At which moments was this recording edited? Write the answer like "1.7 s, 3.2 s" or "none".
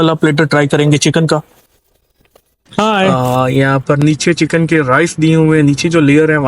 3.1 s

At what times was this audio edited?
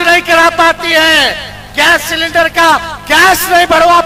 none

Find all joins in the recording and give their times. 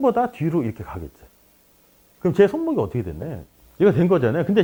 none

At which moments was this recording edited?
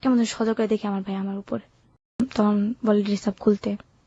2.2 s

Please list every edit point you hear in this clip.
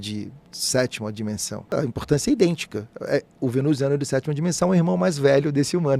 1.7 s

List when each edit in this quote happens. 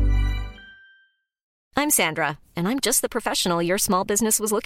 1.5 s

